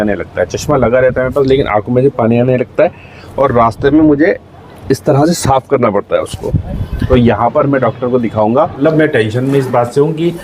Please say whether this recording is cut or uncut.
cut